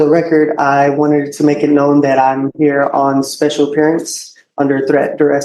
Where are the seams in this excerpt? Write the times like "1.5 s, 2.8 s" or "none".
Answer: none